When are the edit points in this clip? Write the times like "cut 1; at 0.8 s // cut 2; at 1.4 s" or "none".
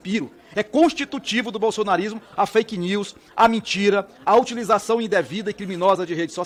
none